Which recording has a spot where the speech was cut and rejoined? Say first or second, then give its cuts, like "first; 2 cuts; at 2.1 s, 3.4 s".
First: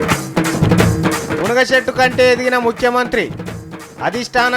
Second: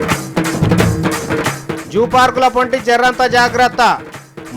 first; 1 cut; at 1.0 s